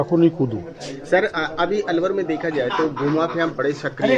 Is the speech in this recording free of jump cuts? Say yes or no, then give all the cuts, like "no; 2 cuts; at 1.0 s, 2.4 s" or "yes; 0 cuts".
yes; 0 cuts